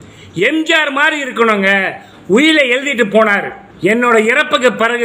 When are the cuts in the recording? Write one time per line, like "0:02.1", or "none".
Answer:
0:03.6